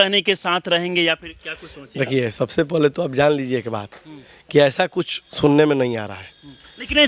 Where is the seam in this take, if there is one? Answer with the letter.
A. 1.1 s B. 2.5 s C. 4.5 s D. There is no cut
D